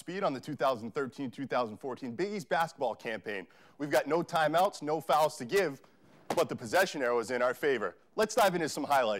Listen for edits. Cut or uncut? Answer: uncut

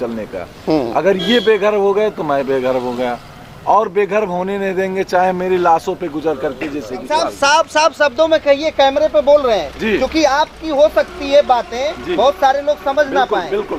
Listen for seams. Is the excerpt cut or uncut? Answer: cut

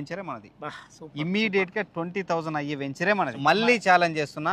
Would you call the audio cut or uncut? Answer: cut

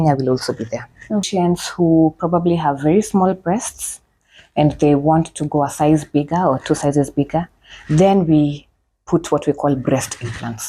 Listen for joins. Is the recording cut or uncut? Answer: cut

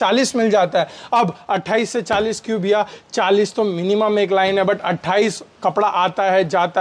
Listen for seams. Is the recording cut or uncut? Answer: uncut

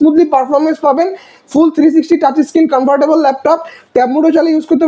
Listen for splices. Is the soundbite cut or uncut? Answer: uncut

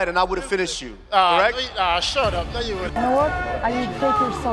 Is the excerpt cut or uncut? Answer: cut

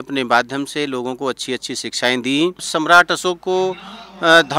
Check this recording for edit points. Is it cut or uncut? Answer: cut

